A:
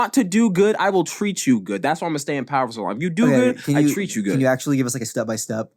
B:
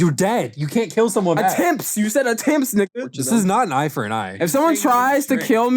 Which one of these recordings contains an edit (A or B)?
B